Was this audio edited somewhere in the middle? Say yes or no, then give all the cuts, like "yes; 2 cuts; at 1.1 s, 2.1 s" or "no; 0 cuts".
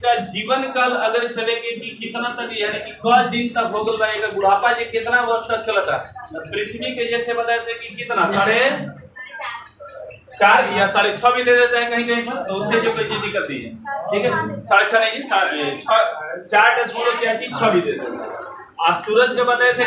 no; 0 cuts